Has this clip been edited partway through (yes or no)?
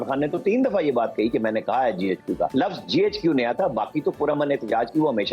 yes